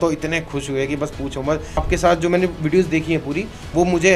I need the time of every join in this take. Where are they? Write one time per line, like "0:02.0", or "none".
0:01.8